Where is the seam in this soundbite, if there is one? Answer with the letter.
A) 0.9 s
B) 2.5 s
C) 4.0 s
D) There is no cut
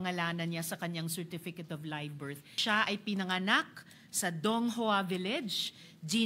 B